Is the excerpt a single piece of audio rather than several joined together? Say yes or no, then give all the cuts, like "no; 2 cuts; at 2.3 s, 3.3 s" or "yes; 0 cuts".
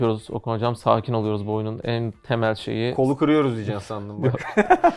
yes; 0 cuts